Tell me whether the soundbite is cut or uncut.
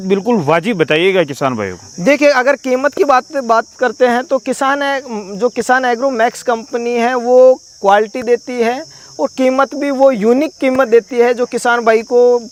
uncut